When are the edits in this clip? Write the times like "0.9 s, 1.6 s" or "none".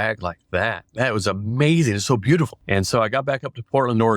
2.6 s